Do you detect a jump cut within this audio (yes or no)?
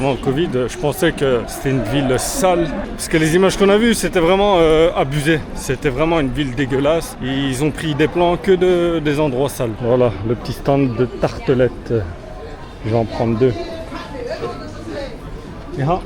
no